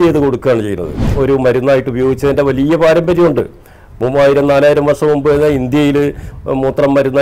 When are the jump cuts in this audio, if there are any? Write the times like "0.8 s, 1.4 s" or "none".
1.1 s